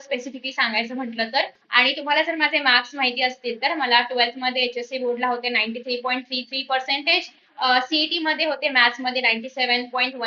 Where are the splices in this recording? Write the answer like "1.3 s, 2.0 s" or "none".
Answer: 1.6 s